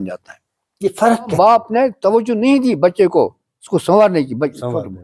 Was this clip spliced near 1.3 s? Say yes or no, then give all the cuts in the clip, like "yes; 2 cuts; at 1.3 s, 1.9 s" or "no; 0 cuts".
yes; 1 cut; at 1.3 s